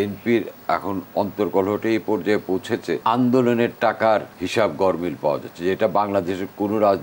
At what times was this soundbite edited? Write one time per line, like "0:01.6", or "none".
0:03.0
0:04.4